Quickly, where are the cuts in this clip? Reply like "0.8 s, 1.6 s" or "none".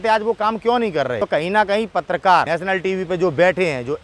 1.2 s, 2.5 s